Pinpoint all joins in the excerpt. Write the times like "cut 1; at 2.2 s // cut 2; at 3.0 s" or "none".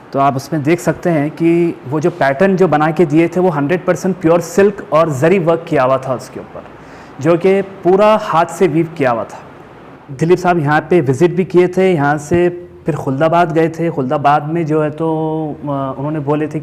cut 1; at 10.1 s